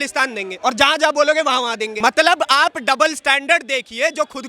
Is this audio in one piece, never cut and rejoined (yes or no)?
no